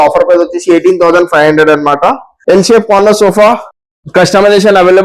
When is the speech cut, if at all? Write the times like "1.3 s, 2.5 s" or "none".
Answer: 2.3 s